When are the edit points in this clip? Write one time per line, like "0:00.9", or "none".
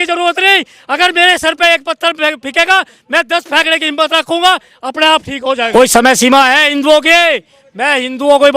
0:05.7